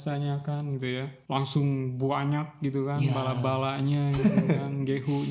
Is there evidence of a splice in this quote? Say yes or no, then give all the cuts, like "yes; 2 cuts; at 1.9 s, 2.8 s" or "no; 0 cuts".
yes; 1 cut; at 1.2 s